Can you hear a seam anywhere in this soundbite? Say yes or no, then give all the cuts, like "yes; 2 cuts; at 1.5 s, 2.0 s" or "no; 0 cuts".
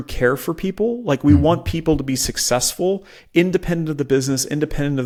no; 0 cuts